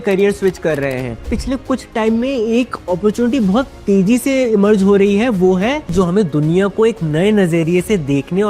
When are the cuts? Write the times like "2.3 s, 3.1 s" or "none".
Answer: 1.3 s, 5.9 s